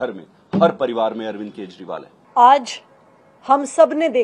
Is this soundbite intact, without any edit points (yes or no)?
yes